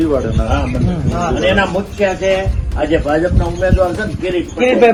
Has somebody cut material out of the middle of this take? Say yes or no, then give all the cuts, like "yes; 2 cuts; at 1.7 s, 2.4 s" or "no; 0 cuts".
no; 0 cuts